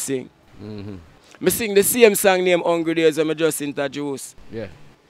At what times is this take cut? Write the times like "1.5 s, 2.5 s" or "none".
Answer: none